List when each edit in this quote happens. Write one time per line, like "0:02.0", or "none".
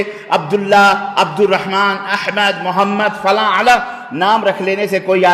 none